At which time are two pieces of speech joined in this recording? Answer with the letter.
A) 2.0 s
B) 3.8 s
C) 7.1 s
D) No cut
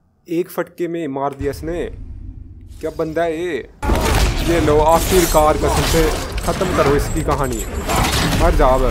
B